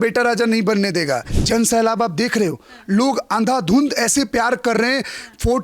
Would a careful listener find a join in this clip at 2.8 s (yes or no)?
no